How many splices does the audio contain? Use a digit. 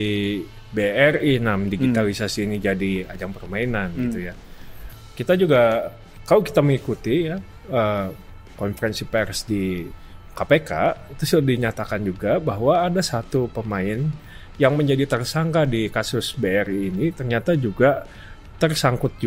0